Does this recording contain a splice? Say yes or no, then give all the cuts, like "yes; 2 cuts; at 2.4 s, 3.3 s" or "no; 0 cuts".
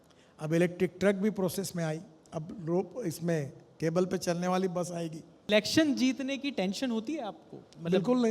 yes; 1 cut; at 5.5 s